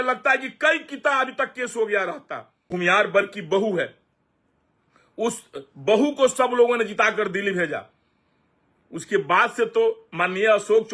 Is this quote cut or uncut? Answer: cut